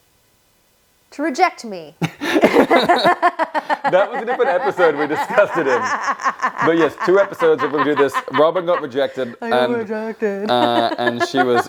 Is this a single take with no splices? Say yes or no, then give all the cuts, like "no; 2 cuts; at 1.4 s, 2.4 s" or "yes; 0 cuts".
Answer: yes; 0 cuts